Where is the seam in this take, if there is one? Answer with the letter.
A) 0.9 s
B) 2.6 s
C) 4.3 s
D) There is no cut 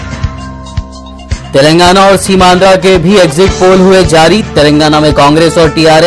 A